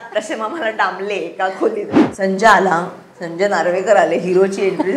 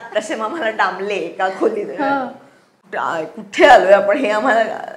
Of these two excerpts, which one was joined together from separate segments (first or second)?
first